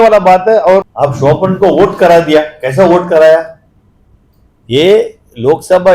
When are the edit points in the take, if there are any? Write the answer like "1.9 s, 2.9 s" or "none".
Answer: 0.9 s